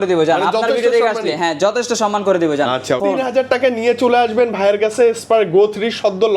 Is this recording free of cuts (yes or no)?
no